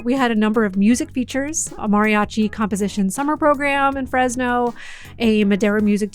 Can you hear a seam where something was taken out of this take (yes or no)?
yes